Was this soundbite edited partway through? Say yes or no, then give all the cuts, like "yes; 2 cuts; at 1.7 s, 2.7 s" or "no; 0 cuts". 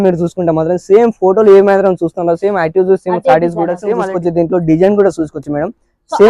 yes; 1 cut; at 3.9 s